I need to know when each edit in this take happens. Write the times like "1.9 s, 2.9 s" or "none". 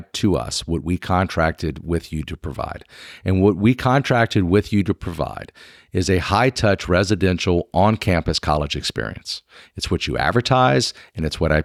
none